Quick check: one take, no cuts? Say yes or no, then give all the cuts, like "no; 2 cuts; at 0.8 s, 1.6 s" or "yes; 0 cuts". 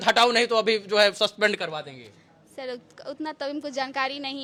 yes; 0 cuts